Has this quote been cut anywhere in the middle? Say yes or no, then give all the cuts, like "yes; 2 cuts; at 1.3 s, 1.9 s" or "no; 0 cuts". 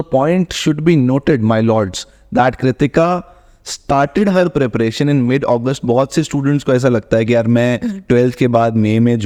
no; 0 cuts